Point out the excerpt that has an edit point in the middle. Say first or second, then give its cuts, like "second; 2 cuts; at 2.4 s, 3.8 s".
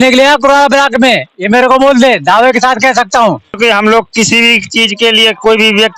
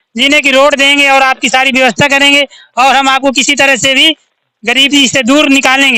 first; 1 cut; at 3.5 s